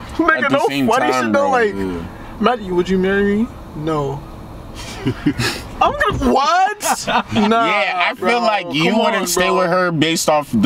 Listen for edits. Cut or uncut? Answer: uncut